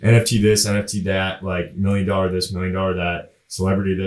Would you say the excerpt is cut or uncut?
uncut